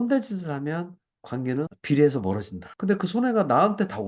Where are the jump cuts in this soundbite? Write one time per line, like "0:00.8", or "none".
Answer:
none